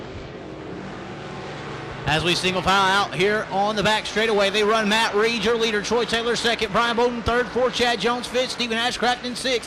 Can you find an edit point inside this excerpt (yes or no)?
no